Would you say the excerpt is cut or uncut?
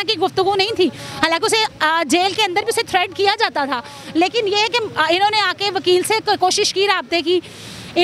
uncut